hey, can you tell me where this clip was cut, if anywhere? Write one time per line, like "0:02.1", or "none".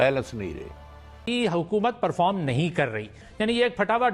0:01.1
0:03.2